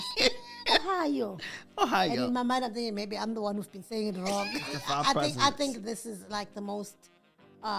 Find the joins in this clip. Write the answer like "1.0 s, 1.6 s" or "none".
4.7 s